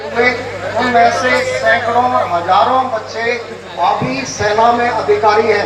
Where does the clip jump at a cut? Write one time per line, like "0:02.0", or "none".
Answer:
none